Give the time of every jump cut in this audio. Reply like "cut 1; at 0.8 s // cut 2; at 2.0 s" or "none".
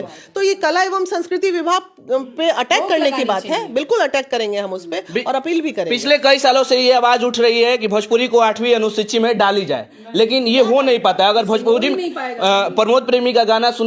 none